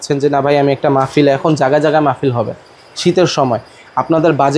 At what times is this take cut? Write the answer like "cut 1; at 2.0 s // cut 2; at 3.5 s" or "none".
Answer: none